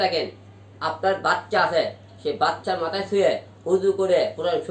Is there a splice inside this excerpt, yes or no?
no